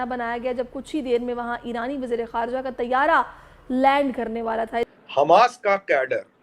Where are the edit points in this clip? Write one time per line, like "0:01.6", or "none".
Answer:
0:04.9